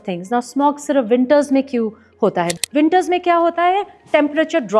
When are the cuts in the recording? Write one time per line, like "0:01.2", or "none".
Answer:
0:02.6